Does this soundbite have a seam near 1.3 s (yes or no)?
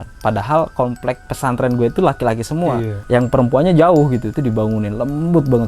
yes